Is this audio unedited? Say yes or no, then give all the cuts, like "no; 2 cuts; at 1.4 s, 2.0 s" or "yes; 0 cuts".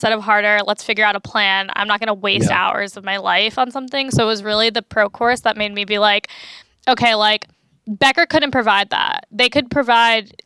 yes; 0 cuts